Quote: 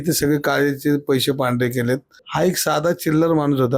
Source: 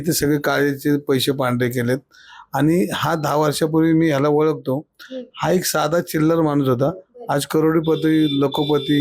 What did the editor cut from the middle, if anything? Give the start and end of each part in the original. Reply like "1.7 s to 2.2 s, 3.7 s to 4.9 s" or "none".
2.2 s to 5.2 s